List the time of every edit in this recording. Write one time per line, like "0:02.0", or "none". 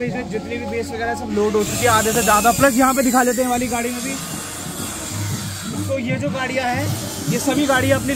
none